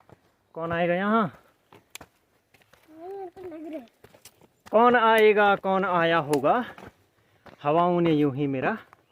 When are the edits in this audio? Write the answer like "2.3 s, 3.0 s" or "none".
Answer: none